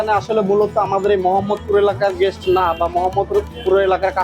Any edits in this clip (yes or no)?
no